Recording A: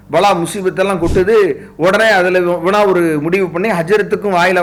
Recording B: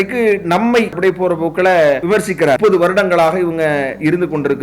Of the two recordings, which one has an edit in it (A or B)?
B